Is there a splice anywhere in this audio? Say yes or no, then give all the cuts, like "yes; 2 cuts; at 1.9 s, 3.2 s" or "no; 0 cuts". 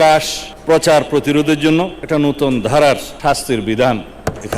yes; 2 cuts; at 2.0 s, 3.1 s